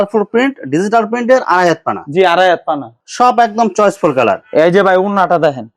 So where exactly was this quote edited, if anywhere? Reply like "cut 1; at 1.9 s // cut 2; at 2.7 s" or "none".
cut 1; at 3.0 s